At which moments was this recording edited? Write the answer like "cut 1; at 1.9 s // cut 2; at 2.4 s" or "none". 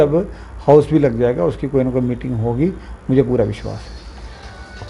none